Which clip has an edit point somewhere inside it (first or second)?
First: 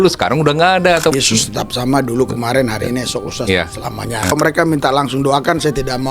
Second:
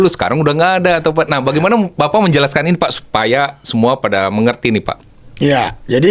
first